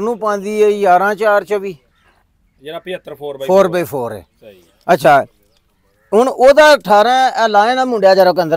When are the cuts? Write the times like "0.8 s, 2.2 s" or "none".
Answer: none